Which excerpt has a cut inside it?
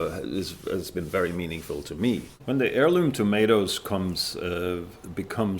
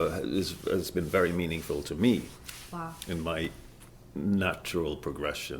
first; 1 cut; at 2.3 s

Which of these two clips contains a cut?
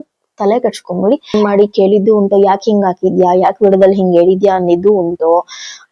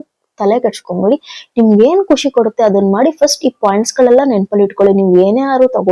first; 1 cut; at 1.3 s

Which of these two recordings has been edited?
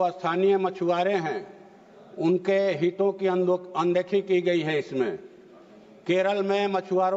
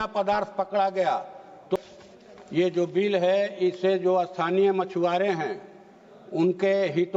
second; 1 cut; at 1.8 s

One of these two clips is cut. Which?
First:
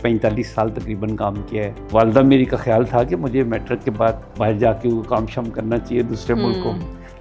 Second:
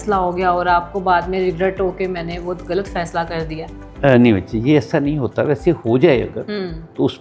first; 2 cuts; at 1.9 s, 4.3 s

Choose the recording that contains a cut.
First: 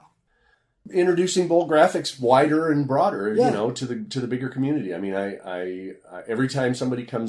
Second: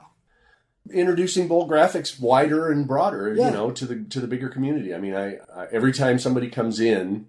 second; 1 cut; at 5.4 s

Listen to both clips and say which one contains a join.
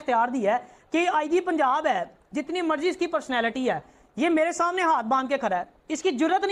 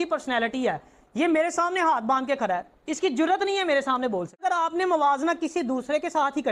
second; 1 cut; at 4.4 s

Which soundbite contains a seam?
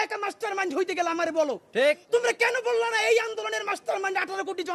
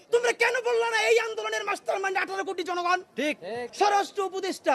second; 1 cut; at 3.7 s

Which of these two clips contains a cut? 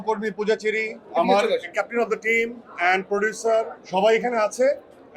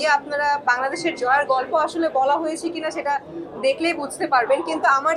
first; 2 cuts; at 1.7 s, 3.8 s

